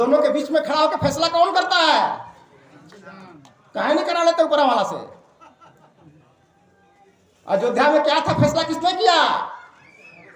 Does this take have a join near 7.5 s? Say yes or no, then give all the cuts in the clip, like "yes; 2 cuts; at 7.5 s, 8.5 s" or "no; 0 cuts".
no; 0 cuts